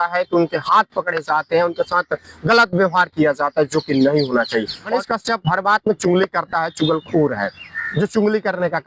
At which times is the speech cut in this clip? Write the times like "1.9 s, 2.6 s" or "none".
4.9 s